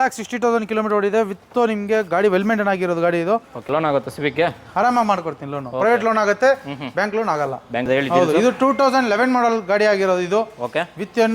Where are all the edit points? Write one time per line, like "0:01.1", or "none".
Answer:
0:03.6
0:07.9